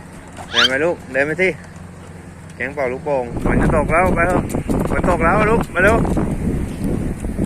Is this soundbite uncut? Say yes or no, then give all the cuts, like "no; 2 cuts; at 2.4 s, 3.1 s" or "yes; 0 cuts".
no; 1 cut; at 3.4 s